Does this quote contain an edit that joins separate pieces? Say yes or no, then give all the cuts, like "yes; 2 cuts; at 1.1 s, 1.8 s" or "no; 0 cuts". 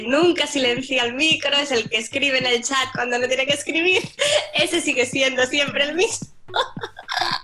no; 0 cuts